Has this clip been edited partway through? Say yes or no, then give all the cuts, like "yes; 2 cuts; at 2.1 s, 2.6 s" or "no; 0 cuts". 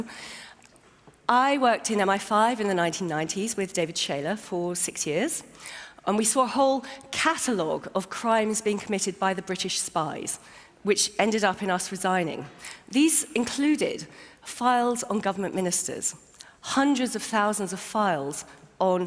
yes; 1 cut; at 16.6 s